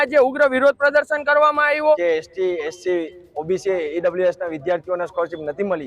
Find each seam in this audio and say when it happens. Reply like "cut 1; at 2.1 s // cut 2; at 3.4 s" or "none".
cut 1; at 2.0 s